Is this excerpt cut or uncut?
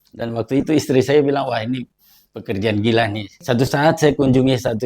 cut